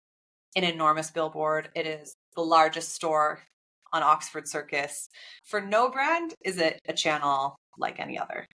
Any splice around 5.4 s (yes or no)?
yes